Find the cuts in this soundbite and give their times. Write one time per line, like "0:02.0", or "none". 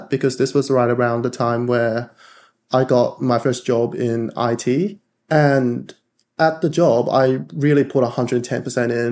0:05.1